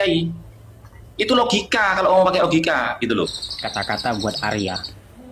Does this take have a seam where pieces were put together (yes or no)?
yes